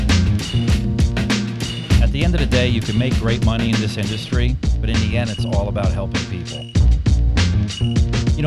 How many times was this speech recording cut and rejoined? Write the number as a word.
zero